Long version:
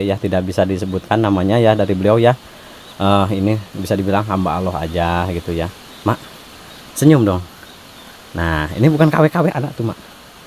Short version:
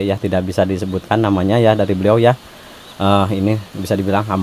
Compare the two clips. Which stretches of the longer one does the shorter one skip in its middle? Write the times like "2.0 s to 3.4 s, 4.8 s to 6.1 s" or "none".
none